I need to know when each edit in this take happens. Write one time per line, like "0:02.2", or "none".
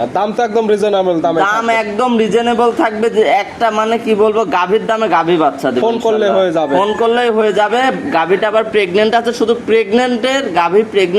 none